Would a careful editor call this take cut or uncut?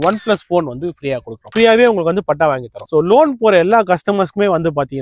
cut